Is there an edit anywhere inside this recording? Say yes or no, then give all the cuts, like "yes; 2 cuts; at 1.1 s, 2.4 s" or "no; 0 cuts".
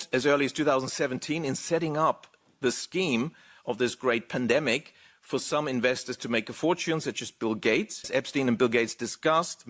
yes; 1 cut; at 8.1 s